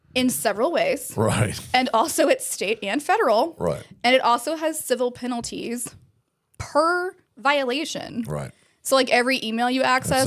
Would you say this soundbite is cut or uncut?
uncut